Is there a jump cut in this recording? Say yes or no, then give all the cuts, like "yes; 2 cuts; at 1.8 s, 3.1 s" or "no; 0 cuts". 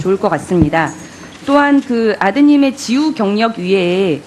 no; 0 cuts